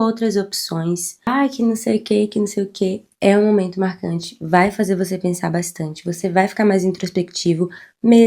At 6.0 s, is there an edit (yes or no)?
no